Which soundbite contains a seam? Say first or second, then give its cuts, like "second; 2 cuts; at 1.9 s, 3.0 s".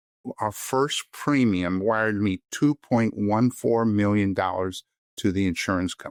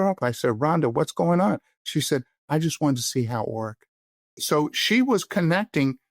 second; 1 cut; at 4.3 s